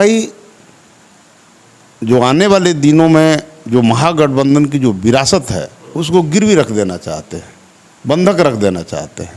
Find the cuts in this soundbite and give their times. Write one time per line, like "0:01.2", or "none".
none